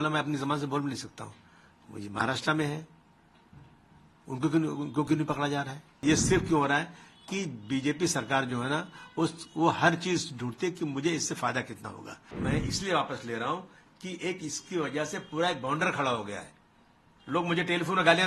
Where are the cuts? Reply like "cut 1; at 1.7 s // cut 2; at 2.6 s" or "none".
cut 1; at 6.0 s // cut 2; at 12.2 s